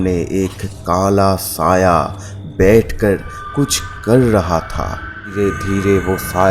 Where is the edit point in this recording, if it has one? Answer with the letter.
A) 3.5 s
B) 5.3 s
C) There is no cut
B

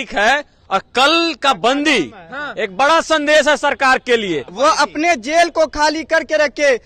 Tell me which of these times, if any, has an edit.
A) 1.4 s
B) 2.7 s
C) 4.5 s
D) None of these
C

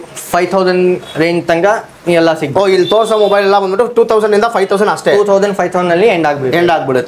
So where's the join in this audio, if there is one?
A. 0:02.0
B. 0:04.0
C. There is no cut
C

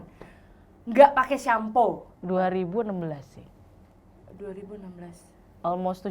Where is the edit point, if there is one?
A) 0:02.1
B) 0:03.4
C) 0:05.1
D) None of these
A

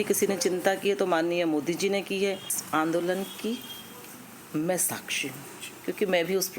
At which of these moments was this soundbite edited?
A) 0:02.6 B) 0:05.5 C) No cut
A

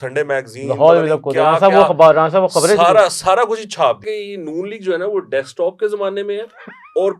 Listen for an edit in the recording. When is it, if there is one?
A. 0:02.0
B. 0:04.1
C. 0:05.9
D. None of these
B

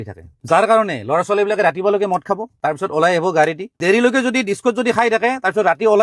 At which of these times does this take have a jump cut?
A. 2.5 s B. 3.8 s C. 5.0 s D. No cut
B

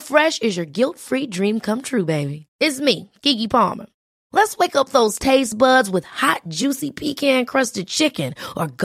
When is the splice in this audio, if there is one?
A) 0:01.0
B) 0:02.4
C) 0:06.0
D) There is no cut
D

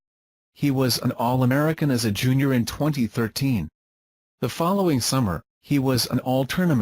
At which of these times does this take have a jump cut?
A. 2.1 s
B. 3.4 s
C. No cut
B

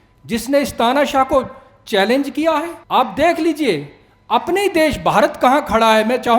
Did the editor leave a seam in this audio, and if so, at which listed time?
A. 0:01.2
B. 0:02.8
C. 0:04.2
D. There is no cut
B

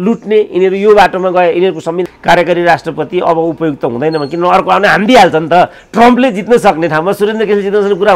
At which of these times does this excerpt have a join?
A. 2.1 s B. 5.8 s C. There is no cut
A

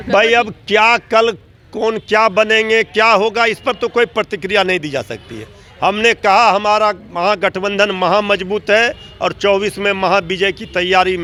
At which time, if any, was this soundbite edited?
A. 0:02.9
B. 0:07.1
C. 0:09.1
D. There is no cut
D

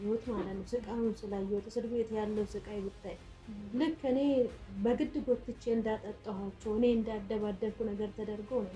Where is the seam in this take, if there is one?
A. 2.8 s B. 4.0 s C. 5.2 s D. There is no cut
D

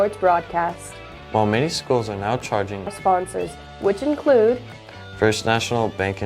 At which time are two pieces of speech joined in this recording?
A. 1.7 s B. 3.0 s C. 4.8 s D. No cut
B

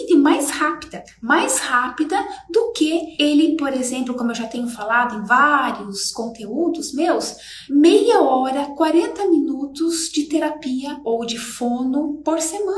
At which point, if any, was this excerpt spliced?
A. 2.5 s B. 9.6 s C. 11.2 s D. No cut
D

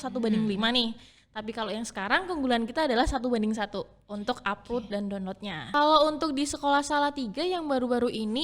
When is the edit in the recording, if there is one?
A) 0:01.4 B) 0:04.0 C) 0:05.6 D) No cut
C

